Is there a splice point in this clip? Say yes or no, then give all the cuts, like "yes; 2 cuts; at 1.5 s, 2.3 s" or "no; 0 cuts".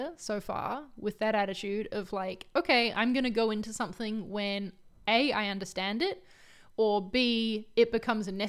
no; 0 cuts